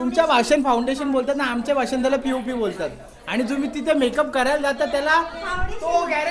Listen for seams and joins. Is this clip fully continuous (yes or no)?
yes